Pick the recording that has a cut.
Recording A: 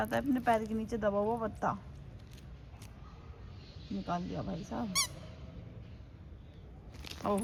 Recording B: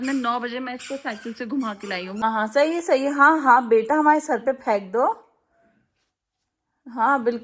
B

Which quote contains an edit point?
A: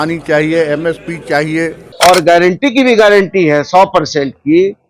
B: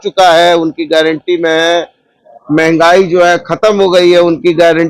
A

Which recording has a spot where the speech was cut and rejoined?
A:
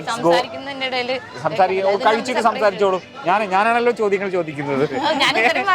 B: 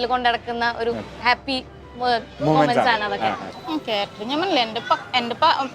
B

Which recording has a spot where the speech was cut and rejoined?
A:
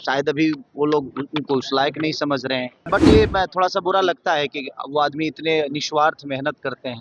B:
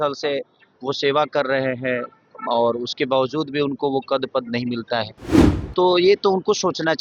A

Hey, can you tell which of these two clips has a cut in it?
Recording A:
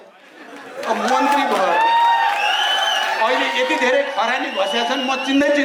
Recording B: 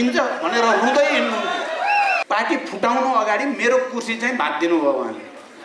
B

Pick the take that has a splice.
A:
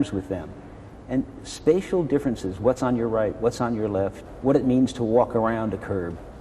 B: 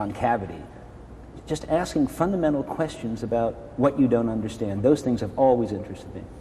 A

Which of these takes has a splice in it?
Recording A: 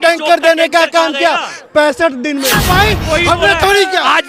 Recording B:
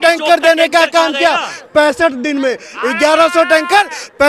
A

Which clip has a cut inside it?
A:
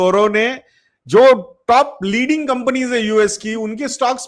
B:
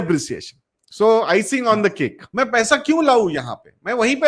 B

